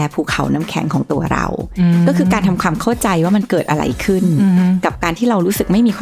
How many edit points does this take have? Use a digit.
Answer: 0